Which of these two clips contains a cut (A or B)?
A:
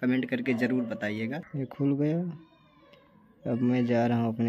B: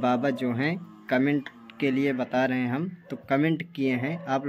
A